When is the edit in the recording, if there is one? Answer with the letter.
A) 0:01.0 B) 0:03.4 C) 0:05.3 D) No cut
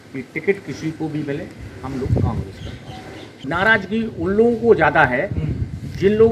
B